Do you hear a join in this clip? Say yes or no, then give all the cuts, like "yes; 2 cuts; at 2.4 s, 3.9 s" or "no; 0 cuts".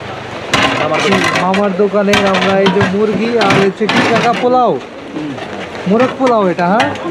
no; 0 cuts